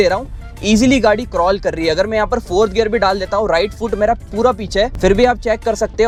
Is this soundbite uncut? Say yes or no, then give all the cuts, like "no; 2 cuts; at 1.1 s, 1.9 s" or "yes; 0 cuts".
yes; 0 cuts